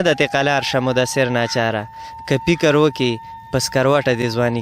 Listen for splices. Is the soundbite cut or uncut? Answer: uncut